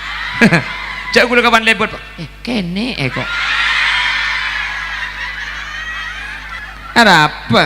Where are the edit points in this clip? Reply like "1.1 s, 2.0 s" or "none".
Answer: 6.6 s